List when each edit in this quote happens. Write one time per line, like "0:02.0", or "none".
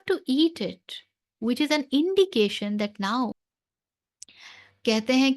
0:03.3